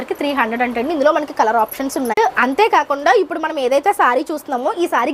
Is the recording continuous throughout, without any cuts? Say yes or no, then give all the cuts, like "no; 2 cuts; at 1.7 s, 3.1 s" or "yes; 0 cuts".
no; 1 cut; at 2.1 s